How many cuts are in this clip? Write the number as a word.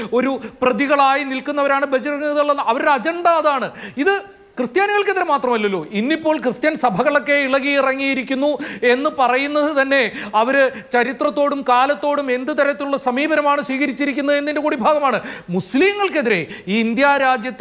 zero